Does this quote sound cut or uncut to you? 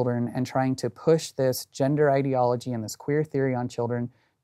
uncut